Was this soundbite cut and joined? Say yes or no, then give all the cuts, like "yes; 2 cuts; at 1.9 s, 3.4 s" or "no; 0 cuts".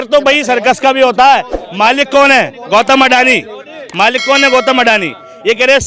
no; 0 cuts